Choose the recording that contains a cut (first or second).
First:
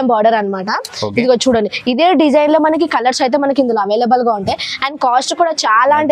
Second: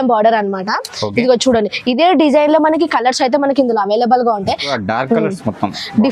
second